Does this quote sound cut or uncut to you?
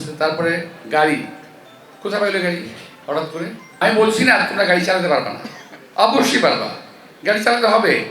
cut